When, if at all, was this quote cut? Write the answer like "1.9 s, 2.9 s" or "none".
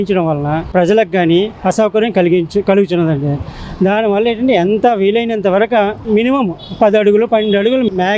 none